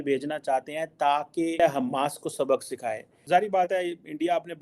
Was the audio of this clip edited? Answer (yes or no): yes